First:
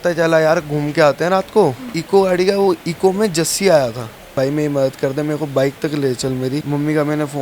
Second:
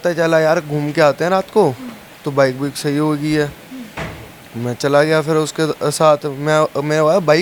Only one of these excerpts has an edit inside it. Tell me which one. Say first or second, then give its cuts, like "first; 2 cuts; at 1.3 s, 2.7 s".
first; 3 cuts; at 1.9 s, 4.3 s, 6.6 s